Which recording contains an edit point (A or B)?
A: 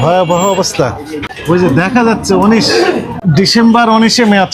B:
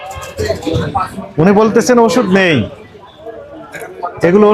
A